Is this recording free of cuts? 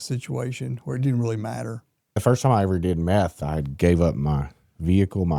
no; 2 cuts; at 2.2 s, 3.4 s

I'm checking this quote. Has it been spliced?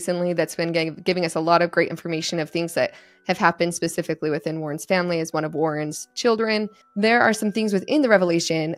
yes; 1 cut; at 6.8 s

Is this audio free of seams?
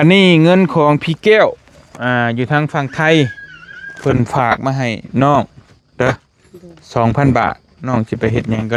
yes; 0 cuts

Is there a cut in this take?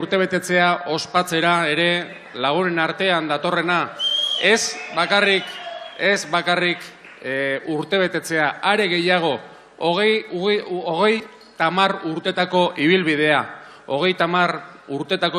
no; 0 cuts

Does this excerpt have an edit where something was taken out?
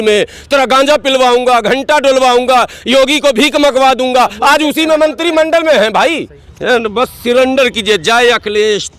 yes; 1 cut; at 6.4 s

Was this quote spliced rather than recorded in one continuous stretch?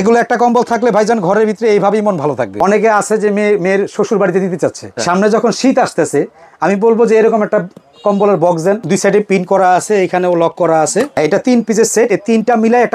yes; 4 cuts; at 2.6 s, 5.0 s, 8.8 s, 11.2 s

